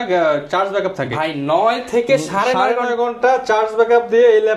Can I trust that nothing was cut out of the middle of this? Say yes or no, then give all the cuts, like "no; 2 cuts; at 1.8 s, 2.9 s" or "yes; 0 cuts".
yes; 0 cuts